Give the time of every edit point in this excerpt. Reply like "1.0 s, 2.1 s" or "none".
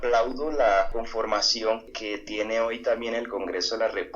0.9 s